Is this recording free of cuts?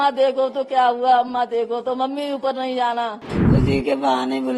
no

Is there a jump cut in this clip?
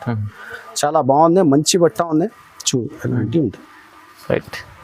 no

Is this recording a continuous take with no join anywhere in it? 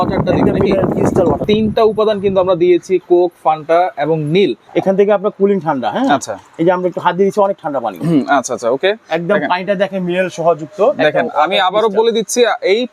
no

